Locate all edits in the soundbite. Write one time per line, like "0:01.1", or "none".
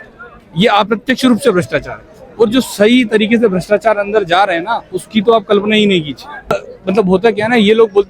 0:06.5